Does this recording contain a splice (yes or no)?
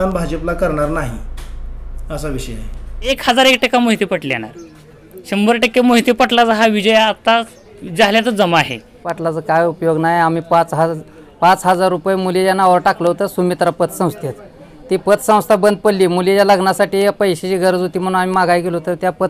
yes